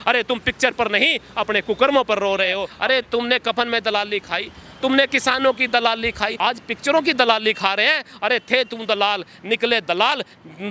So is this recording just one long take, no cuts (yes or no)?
no